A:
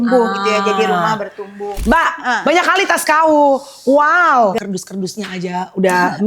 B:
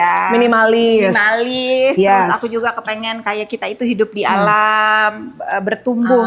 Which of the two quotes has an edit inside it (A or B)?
A